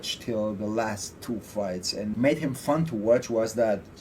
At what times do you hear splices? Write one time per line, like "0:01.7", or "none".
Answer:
0:02.1